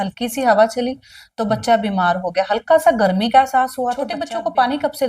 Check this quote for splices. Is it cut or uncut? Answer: cut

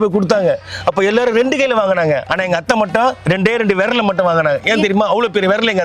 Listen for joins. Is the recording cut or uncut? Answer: uncut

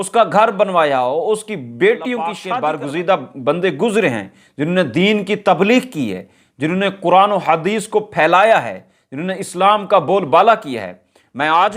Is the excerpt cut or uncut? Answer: cut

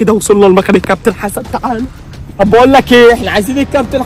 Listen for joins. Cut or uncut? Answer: cut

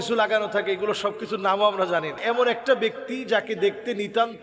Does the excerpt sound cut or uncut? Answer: cut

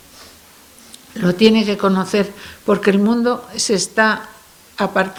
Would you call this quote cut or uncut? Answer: uncut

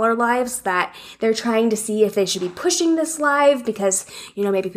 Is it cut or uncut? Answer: uncut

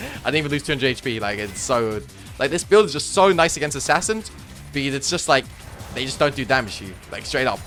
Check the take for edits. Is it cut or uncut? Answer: uncut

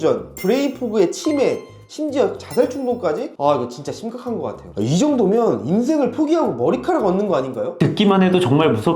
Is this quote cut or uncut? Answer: cut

